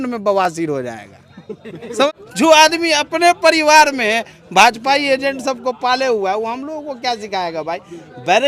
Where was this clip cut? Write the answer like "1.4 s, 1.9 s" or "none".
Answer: 2.2 s